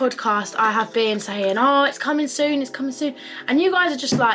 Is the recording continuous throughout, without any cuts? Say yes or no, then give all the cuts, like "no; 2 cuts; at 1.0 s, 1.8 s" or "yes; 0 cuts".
yes; 0 cuts